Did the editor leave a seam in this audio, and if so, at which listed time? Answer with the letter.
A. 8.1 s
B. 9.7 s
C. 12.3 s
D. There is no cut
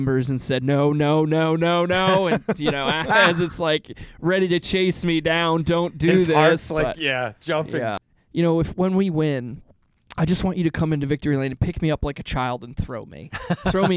A